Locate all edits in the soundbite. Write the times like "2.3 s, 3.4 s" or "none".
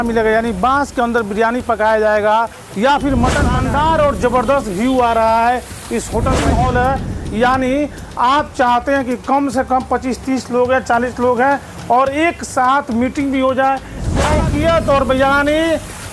3.5 s, 6.4 s, 14.2 s